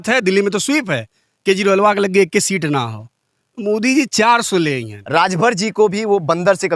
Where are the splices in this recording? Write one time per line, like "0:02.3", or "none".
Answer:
0:04.9